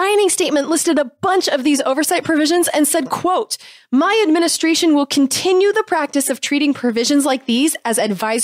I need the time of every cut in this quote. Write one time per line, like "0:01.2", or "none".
none